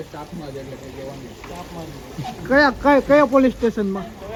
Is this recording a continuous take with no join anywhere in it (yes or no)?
yes